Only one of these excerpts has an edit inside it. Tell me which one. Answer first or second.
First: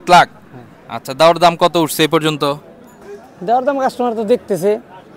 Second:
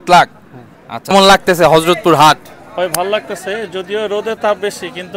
second